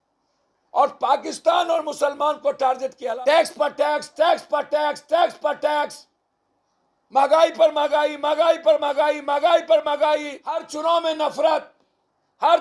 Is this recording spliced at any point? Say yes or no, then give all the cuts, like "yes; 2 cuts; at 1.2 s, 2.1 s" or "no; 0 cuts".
yes; 2 cuts; at 3.1 s, 10.7 s